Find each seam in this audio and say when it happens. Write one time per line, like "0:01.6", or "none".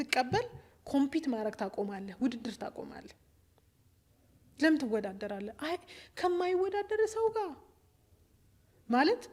none